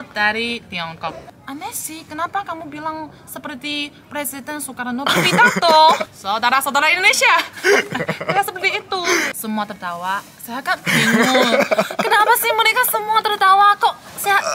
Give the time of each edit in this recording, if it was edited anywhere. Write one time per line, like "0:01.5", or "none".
0:01.3
0:06.0
0:07.5
0:09.3